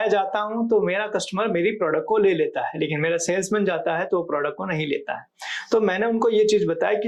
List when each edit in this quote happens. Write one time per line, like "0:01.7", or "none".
none